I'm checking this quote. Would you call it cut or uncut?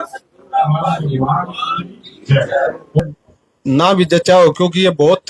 cut